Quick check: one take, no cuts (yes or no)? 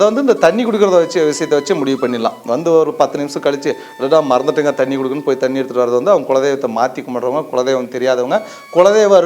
yes